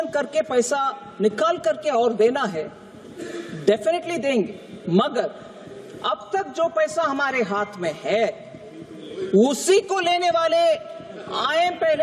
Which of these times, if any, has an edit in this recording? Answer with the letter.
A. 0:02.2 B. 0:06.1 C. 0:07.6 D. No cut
D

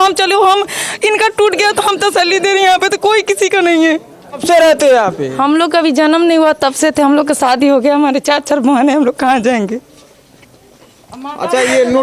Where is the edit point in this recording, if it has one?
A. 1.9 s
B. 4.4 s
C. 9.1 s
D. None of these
B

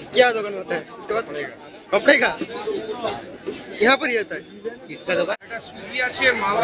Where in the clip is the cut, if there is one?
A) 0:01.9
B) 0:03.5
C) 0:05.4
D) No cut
C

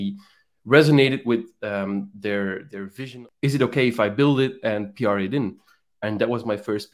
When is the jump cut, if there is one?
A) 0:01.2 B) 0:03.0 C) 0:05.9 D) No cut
B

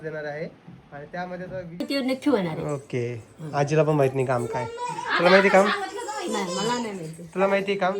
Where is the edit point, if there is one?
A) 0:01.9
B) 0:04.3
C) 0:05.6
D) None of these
A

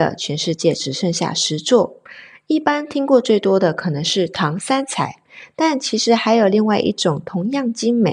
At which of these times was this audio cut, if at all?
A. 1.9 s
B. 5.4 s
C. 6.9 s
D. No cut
D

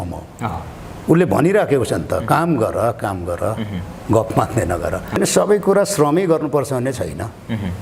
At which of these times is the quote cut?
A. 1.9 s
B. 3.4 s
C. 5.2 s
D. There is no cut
C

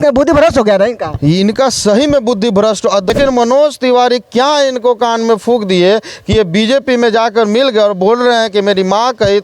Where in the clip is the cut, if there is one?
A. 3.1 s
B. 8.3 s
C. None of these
A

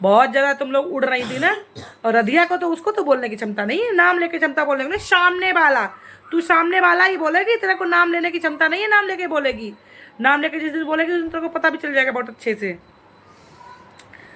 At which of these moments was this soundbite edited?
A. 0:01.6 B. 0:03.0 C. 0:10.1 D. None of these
D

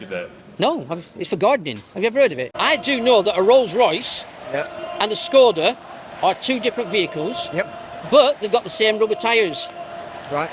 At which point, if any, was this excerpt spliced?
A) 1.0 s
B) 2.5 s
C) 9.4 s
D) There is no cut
B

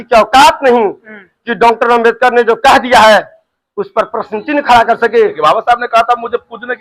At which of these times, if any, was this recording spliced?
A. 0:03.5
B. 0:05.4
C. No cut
B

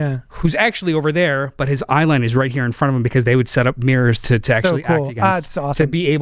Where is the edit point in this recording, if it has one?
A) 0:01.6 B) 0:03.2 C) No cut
C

